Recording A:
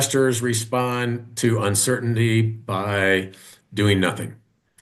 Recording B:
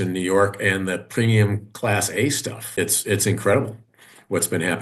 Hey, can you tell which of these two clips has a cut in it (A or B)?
B